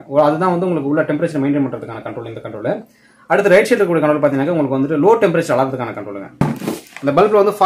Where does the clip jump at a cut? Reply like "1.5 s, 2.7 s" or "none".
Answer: 6.4 s